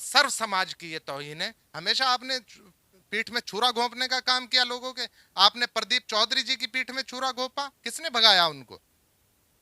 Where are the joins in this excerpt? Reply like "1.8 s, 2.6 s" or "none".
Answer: 1.7 s

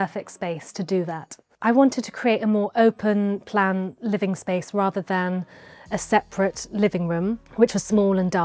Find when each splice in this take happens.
1.5 s, 7.4 s

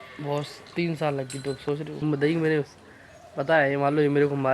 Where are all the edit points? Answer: 2.0 s

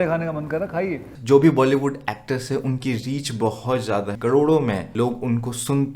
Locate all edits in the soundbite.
1.1 s, 4.1 s, 4.9 s

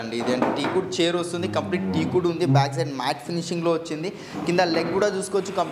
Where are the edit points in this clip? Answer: none

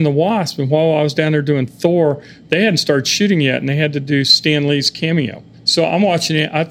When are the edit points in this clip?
5.6 s

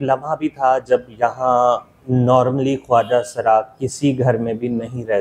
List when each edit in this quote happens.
none

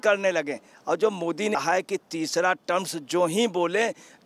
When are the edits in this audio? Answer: 1.5 s

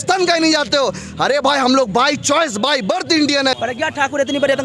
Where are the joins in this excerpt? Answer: 3.5 s

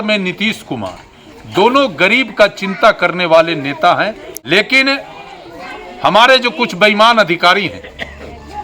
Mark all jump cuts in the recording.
4.3 s

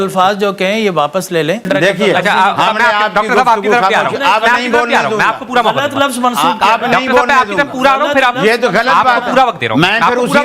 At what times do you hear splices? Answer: 1.6 s

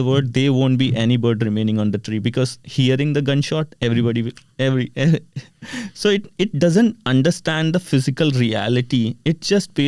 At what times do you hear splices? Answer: none

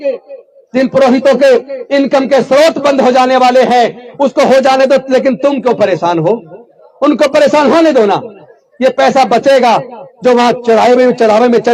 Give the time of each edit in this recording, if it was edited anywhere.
none

